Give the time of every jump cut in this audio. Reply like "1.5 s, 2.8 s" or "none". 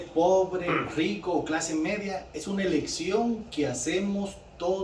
none